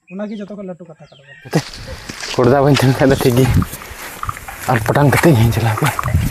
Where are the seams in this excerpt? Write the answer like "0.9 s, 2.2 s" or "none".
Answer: 1.5 s